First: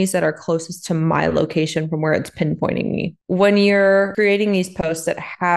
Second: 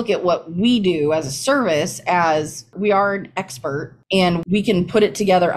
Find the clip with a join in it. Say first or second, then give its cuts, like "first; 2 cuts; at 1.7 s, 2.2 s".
first; 2 cuts; at 3.2 s, 4.1 s